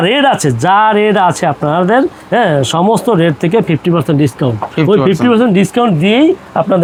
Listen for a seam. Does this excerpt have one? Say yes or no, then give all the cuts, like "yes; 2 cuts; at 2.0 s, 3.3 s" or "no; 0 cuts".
no; 0 cuts